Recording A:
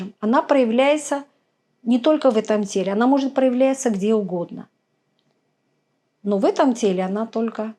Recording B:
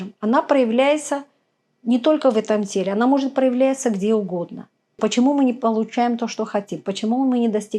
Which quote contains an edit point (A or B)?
B